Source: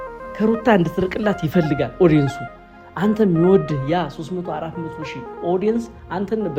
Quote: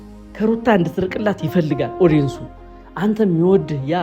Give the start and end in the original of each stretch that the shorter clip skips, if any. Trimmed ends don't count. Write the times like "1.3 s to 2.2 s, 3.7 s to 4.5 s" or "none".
none